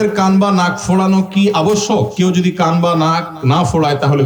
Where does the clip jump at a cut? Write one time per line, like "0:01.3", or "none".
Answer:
0:02.1